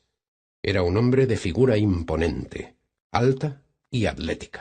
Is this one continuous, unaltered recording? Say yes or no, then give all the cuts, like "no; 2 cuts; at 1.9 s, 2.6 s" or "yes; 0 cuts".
no; 1 cut; at 2.0 s